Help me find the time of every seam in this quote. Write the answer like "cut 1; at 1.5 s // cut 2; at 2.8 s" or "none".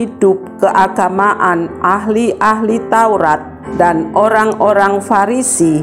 cut 1; at 3.6 s